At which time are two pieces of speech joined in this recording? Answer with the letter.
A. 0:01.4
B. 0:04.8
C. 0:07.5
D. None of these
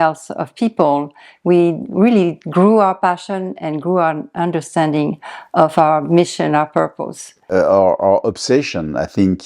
C